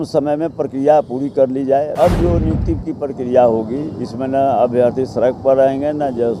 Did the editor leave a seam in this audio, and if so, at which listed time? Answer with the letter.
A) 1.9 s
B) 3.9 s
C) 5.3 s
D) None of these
A